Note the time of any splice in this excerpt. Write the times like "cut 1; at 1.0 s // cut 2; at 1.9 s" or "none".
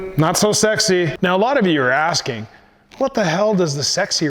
cut 1; at 1.1 s